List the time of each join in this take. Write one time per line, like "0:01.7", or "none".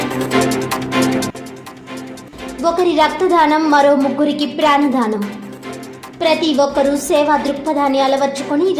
0:01.3